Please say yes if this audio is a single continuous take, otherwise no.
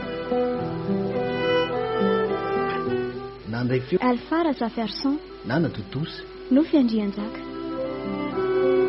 no